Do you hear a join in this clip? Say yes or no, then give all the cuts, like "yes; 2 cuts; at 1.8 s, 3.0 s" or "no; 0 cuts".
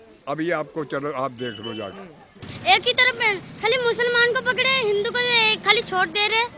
yes; 1 cut; at 2.4 s